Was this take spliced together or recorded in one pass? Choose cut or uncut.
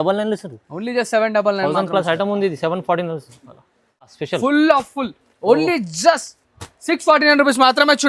cut